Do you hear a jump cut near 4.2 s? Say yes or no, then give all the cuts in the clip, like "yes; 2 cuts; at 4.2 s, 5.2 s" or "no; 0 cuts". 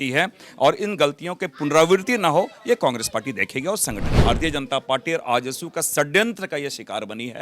yes; 1 cut; at 4.2 s